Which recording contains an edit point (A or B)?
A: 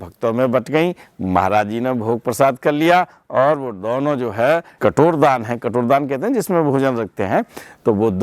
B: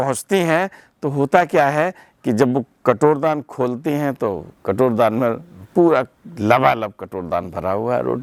A